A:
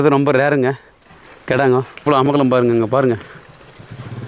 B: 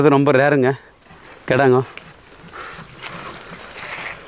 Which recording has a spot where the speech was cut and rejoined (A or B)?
A